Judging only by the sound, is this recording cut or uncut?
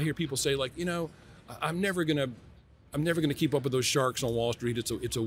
uncut